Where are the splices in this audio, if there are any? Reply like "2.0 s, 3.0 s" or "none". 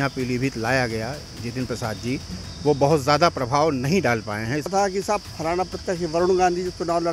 4.7 s